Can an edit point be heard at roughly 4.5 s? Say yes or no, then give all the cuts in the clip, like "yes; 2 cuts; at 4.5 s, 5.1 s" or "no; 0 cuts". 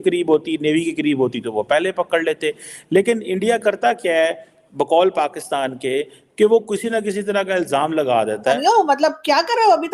no; 1 cut; at 8.6 s